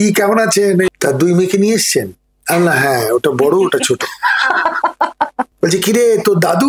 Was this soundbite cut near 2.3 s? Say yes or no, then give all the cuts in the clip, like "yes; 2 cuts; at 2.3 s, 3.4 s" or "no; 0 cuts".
no; 2 cuts; at 0.9 s, 5.5 s